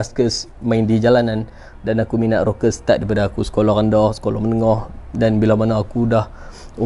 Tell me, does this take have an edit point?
no; 0 cuts

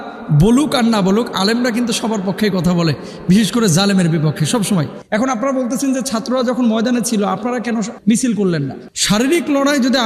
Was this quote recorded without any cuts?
no; 2 cuts; at 5.0 s, 8.8 s

